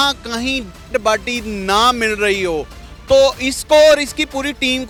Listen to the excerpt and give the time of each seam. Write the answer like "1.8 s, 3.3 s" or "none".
none